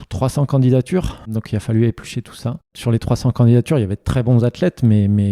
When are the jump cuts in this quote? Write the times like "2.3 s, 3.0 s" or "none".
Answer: 1.3 s, 2.7 s